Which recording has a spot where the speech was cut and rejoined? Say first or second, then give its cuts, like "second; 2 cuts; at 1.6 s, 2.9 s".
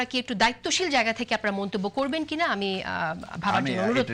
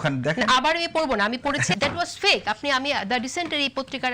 second; 1 cut; at 1.7 s